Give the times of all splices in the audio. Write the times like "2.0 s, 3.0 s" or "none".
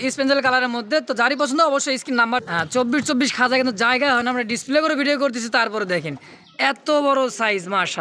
2.4 s